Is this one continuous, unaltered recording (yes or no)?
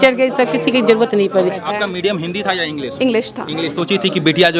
no